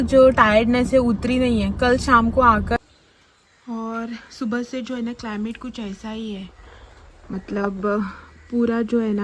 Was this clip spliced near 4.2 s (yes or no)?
no